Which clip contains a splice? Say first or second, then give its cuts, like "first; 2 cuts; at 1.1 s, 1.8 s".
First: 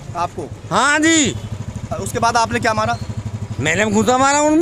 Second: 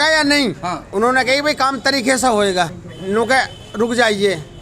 second; 1 cut; at 2.9 s